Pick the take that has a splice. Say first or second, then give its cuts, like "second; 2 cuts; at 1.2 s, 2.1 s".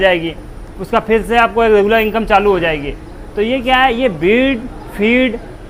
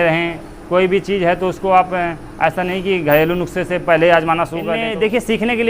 second; 1 cut; at 4.8 s